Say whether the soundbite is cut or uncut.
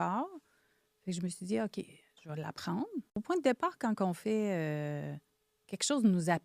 cut